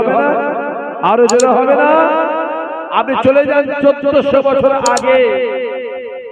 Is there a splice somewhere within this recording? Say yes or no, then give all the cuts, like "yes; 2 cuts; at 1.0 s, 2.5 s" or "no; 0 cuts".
no; 0 cuts